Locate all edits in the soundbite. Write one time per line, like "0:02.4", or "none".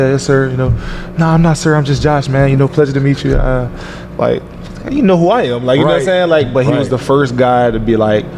none